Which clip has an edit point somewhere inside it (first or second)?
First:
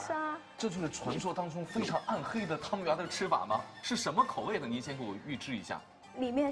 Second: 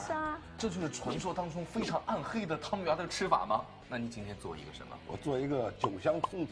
second